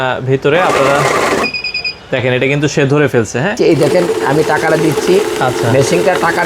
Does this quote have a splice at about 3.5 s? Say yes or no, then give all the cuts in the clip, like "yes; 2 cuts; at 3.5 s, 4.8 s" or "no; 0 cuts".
yes; 1 cut; at 3.5 s